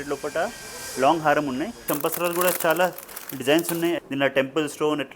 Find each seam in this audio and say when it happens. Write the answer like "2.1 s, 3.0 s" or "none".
1.8 s, 4.0 s

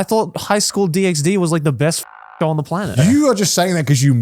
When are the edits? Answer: 2.9 s

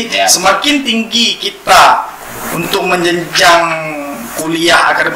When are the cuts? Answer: none

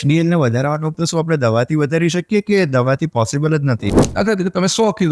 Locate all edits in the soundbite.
0.9 s, 4.0 s

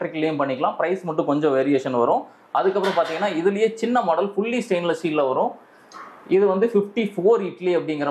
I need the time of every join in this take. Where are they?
none

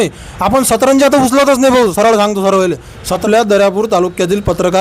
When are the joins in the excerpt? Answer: 3.2 s

